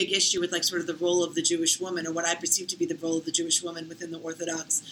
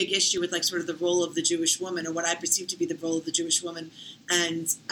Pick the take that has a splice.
second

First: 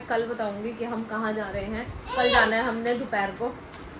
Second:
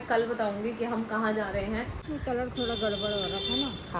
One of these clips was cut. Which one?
second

